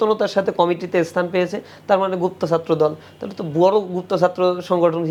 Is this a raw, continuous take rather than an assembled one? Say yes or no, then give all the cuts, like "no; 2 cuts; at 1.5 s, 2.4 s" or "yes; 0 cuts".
yes; 0 cuts